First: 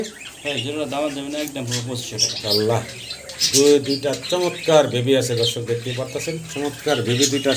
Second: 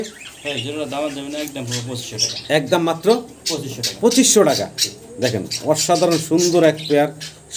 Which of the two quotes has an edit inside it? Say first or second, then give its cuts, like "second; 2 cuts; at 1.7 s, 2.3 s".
first; 1 cut; at 2.3 s